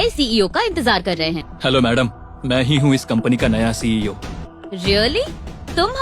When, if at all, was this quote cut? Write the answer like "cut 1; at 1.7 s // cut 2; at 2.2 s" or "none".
cut 1; at 1.5 s // cut 2; at 4.4 s